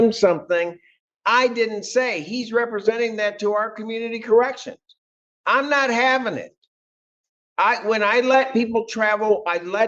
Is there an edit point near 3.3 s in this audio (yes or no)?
yes